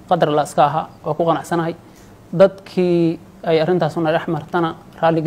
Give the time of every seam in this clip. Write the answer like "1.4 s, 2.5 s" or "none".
none